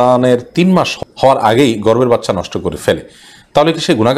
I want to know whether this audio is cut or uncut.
cut